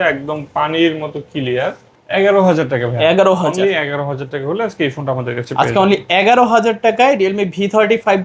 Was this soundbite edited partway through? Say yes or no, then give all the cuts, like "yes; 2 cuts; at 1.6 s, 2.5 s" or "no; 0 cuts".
yes; 1 cut; at 1.9 s